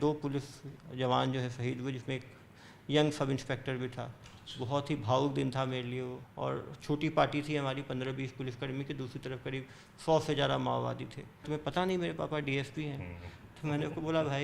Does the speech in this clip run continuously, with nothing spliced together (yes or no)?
no